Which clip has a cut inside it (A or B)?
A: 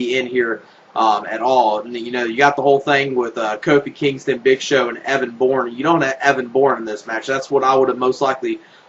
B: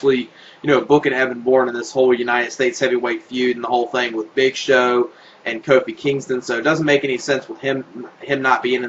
A